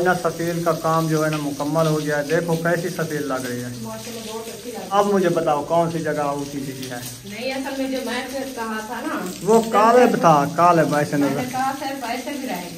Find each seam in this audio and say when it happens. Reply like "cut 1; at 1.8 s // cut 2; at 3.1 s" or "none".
cut 1; at 4.9 s